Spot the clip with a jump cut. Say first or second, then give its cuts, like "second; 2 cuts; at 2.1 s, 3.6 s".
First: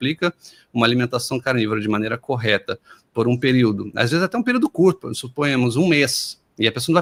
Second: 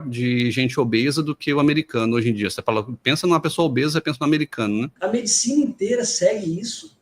second; 1 cut; at 4.9 s